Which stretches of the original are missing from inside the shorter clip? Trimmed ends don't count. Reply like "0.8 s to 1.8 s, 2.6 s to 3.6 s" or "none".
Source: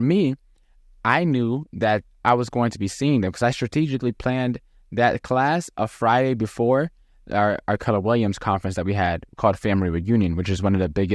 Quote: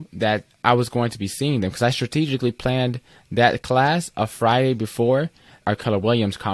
7.2 s to 7.6 s